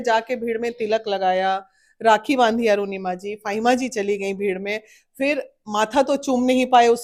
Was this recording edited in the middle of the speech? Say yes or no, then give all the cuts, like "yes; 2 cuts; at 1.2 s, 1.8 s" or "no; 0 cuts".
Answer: no; 0 cuts